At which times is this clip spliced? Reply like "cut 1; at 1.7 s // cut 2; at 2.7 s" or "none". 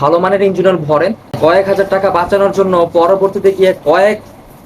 cut 1; at 1.4 s